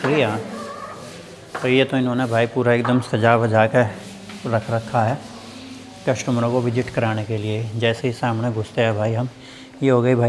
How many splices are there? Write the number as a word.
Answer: zero